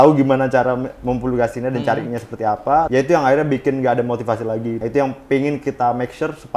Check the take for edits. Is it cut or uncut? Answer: cut